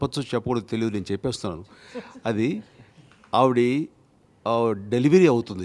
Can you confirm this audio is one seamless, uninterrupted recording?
yes; 0 cuts

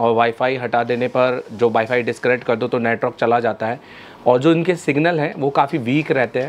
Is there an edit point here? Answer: no; 0 cuts

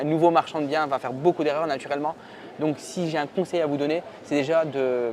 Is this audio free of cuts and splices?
yes; 0 cuts

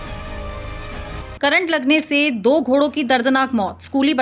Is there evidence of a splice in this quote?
yes; 1 cut; at 1.1 s

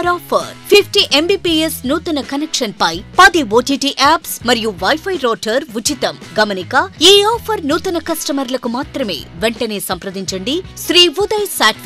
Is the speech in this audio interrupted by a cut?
yes; 1 cut; at 10.7 s

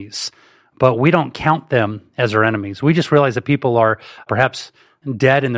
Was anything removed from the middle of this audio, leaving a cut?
yes; 1 cut; at 4.3 s

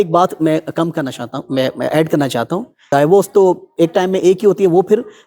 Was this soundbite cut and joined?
yes; 1 cut; at 2.8 s

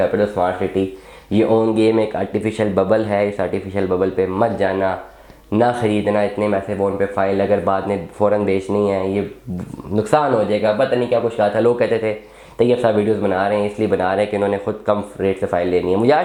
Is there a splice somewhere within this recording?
no; 0 cuts

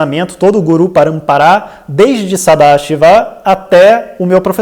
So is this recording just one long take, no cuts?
yes; 0 cuts

